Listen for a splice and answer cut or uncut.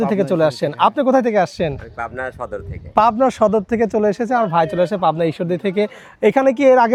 uncut